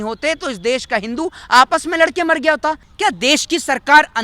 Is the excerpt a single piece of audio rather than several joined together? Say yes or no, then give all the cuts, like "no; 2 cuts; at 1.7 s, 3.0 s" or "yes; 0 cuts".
no; 1 cut; at 2.9 s